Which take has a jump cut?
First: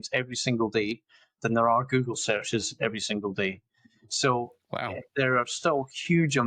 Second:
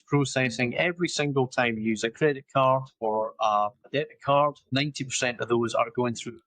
second; 3 cuts; at 2.9 s, 3.9 s, 4.6 s

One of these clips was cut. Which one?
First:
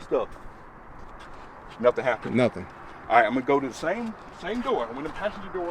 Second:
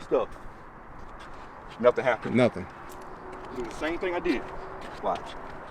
second; 1 cut; at 2.9 s

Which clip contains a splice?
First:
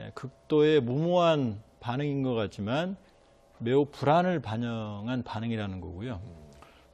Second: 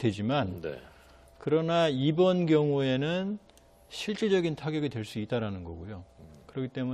second; 1 cut; at 1.8 s

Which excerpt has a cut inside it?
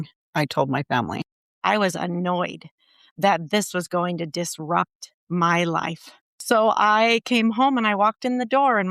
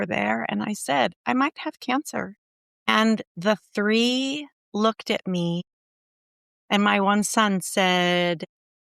first; 2 cuts; at 1.3 s, 6.3 s

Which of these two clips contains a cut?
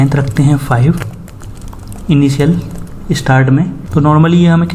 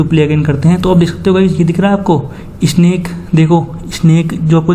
first; 1 cut; at 3.8 s

